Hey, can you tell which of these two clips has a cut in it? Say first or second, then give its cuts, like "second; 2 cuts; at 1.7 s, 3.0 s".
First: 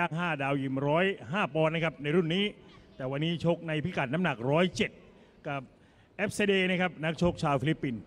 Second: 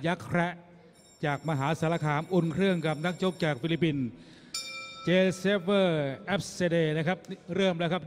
second; 1 cut; at 4.2 s